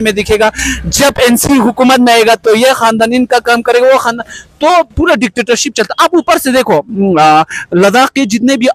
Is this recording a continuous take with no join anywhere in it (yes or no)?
yes